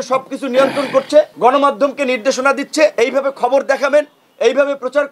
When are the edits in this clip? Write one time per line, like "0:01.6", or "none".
0:01.3
0:02.9